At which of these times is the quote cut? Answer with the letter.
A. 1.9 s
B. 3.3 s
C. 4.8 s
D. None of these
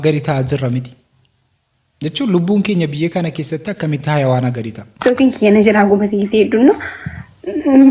C